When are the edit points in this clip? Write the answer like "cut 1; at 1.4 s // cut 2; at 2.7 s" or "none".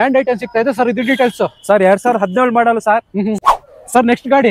cut 1; at 3.4 s